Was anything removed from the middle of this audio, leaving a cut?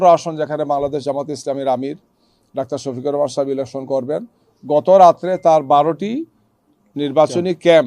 no; 0 cuts

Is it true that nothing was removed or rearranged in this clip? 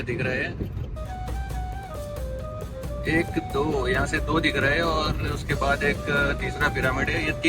yes; 0 cuts

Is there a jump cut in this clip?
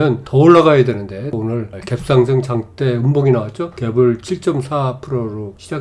yes; 1 cut; at 1.3 s

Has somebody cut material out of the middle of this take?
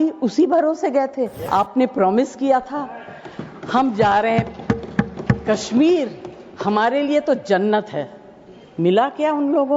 yes; 1 cut; at 1.4 s

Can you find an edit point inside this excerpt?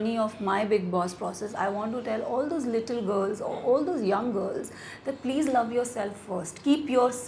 no; 0 cuts

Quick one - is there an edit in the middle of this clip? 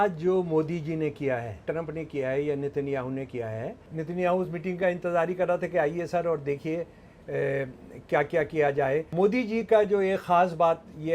yes; 3 cuts; at 1.6 s, 3.8 s, 9.1 s

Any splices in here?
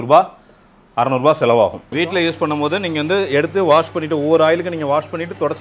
yes; 1 cut; at 1.8 s

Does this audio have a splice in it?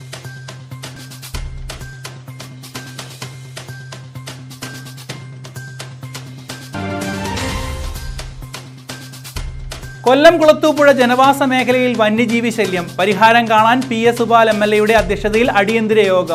no; 0 cuts

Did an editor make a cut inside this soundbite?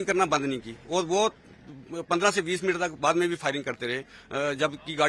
no; 0 cuts

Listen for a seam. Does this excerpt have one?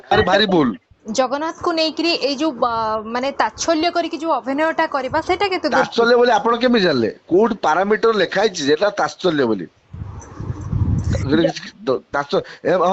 no; 0 cuts

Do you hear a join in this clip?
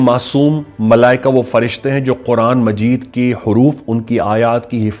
no; 0 cuts

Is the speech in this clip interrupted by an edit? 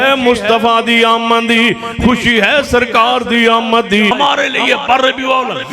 yes; 1 cut; at 4.1 s

